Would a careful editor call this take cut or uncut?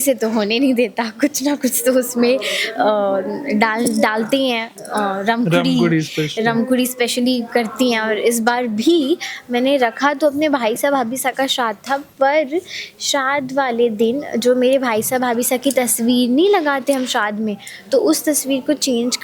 uncut